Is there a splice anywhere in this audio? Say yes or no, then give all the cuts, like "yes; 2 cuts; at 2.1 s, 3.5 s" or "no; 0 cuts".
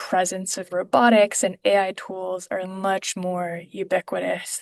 no; 0 cuts